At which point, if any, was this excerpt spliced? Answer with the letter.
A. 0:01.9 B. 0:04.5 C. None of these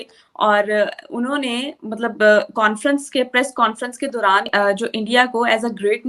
B